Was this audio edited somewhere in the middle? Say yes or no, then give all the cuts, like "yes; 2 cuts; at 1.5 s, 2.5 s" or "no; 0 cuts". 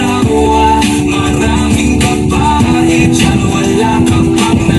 no; 0 cuts